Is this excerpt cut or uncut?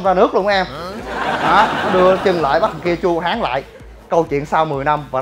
uncut